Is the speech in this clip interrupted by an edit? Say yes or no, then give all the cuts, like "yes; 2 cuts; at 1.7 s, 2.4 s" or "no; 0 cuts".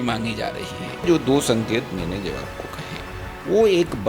yes; 1 cut; at 1.0 s